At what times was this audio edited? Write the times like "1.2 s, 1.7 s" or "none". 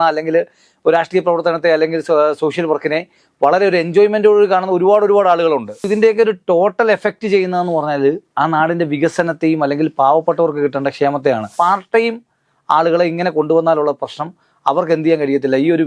5.9 s, 11.5 s